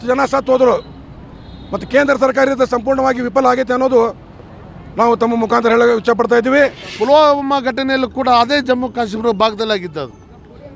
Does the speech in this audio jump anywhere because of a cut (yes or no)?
yes